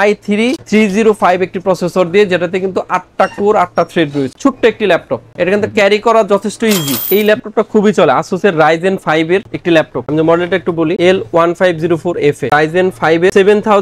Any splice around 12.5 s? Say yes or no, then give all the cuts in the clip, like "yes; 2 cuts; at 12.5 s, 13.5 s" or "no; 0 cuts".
yes; 3 cuts; at 4.3 s, 7.0 s, 12.5 s